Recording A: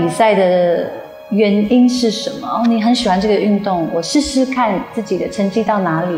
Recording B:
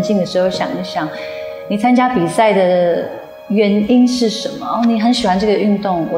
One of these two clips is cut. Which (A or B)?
A